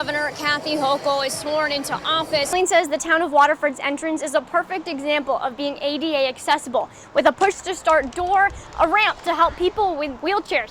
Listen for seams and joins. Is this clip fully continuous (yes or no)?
no